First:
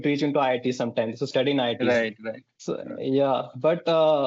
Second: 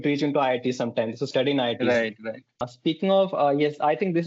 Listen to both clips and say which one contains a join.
second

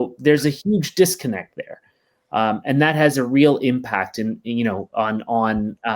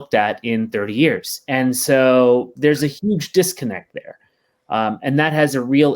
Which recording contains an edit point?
second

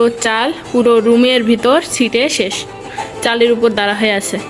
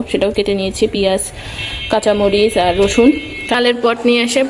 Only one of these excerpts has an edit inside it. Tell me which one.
second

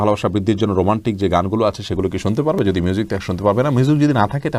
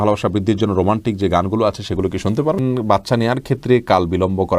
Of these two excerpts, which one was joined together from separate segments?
second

